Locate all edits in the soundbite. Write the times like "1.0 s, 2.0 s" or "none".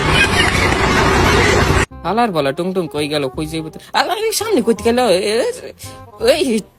none